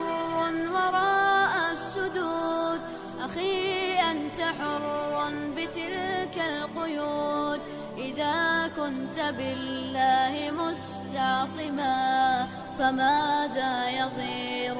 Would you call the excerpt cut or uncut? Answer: uncut